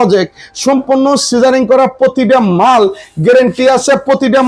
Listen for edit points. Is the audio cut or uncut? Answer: uncut